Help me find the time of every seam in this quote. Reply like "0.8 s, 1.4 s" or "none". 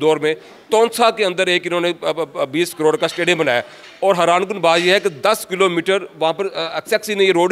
none